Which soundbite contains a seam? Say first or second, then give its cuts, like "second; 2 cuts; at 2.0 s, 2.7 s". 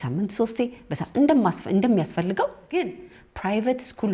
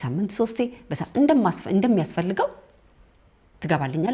first; 1 cut; at 2.6 s